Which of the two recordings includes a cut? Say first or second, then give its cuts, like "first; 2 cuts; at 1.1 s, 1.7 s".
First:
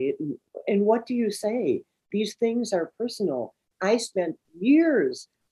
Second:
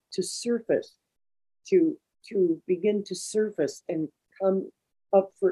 first; 1 cut; at 3.6 s